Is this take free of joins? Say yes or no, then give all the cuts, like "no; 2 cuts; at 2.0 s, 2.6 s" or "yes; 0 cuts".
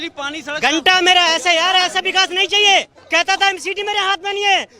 no; 1 cut; at 3.0 s